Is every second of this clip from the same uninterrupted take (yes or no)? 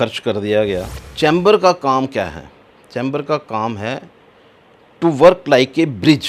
no